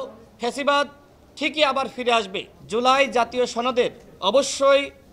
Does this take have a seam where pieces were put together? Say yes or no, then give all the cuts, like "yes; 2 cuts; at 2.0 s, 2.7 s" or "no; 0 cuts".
yes; 1 cut; at 2.5 s